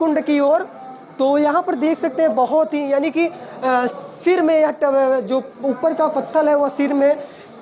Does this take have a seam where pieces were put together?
no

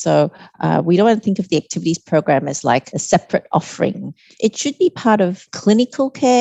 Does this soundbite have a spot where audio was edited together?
yes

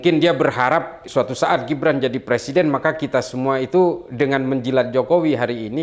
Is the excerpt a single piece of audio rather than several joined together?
no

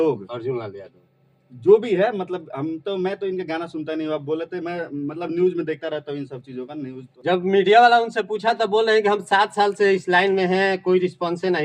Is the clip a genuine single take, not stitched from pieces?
no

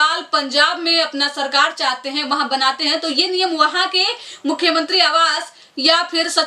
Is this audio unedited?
yes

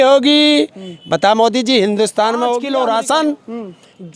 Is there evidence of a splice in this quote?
yes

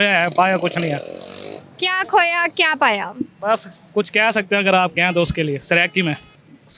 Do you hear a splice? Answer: no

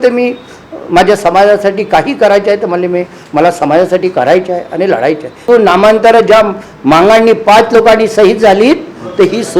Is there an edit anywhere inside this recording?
yes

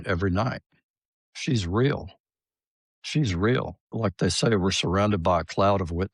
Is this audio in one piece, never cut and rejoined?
no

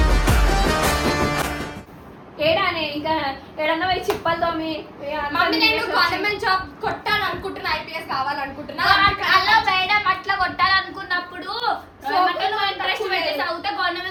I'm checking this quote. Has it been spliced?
no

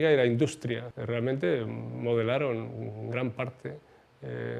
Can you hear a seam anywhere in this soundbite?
yes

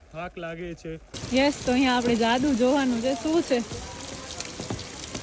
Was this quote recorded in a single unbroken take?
no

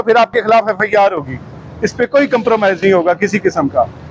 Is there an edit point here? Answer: no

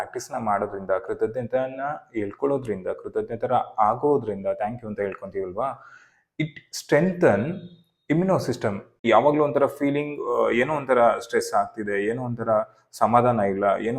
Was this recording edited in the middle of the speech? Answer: yes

